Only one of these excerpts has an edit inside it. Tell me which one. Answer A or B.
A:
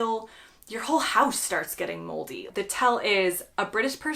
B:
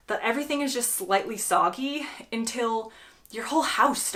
A